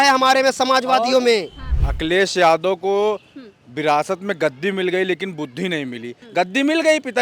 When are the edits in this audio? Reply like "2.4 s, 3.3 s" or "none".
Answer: 1.6 s, 6.2 s